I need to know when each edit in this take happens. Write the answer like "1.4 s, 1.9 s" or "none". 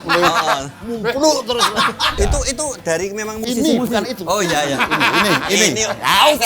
2.1 s